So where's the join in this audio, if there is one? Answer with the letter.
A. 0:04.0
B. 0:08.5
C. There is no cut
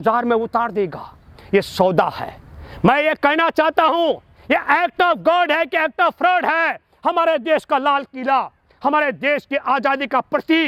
C